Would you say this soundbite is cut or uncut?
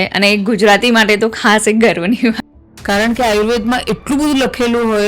cut